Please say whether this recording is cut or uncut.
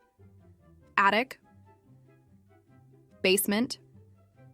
cut